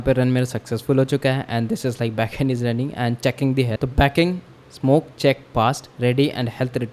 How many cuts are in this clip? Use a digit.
1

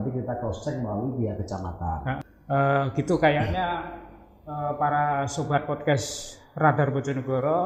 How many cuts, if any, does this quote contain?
1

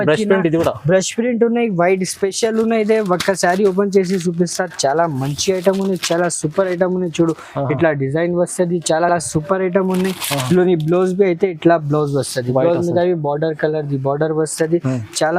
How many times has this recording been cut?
0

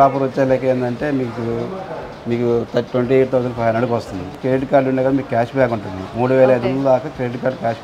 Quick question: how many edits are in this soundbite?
1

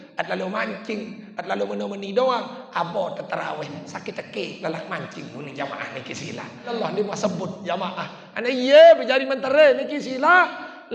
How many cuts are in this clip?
1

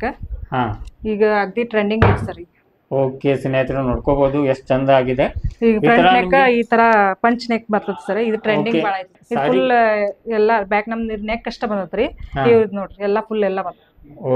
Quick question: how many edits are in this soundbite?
1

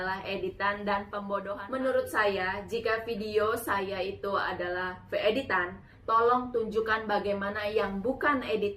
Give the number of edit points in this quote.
1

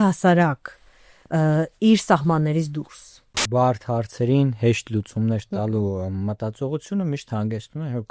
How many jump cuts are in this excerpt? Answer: 1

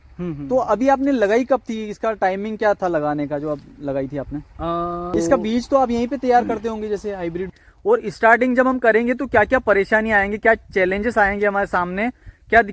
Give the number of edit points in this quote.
2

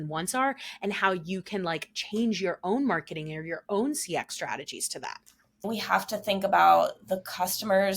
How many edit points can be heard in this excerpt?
1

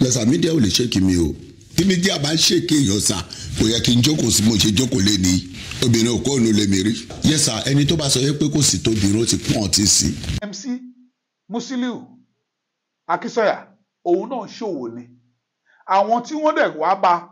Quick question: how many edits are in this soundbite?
1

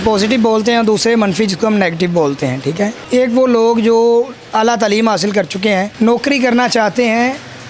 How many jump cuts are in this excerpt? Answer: 2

